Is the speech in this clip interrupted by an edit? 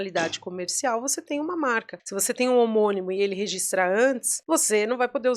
yes; 2 cuts; at 2.0 s, 4.3 s

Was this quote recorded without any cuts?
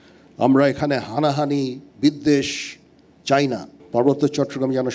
no; 1 cut; at 3.8 s

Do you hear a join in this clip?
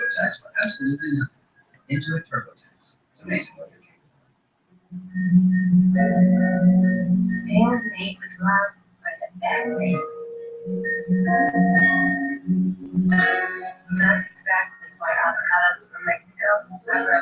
no; 0 cuts

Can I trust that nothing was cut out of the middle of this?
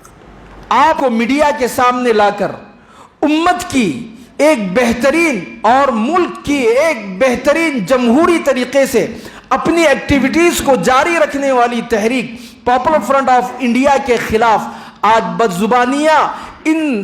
no; 1 cut; at 1.0 s

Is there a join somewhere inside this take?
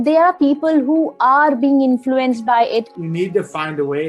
yes; 1 cut; at 2.9 s

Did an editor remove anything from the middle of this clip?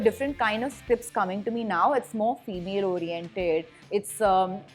no; 0 cuts

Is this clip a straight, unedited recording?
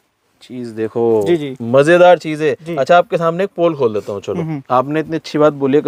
yes; 0 cuts

